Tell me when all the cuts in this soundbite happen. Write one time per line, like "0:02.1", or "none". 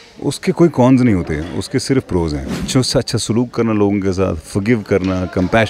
0:02.7